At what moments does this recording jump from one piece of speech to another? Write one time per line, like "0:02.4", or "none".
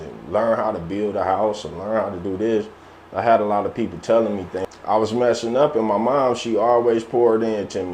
0:04.5